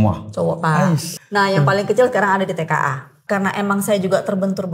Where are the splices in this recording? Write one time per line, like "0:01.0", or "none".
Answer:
0:01.1
0:03.1